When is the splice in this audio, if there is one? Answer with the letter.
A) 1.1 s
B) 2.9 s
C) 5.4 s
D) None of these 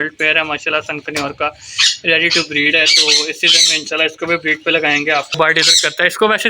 C